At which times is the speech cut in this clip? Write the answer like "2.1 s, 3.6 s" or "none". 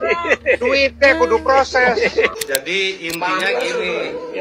2.3 s